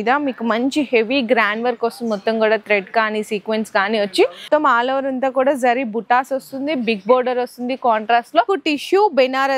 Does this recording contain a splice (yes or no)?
yes